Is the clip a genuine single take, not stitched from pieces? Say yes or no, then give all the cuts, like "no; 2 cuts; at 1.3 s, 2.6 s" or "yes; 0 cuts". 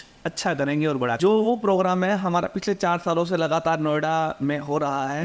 no; 1 cut; at 1.2 s